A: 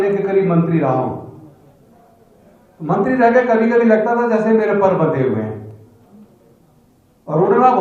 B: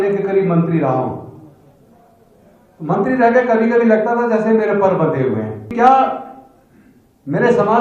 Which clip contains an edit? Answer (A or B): B